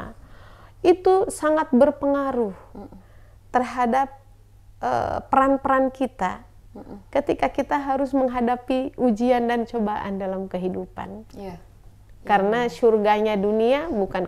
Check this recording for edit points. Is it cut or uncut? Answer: uncut